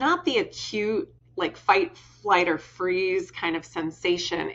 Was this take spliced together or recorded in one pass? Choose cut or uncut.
cut